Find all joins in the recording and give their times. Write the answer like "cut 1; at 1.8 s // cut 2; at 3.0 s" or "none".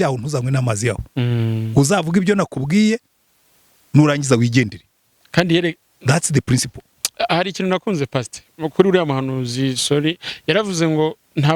none